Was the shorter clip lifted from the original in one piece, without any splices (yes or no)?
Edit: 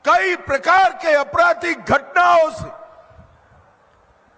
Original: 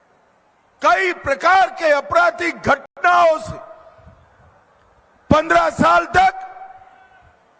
no